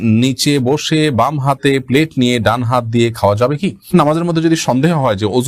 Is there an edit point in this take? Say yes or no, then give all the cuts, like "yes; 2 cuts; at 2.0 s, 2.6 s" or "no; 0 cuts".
yes; 1 cut; at 3.9 s